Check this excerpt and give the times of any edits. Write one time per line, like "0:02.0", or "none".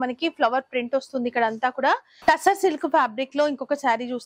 0:02.1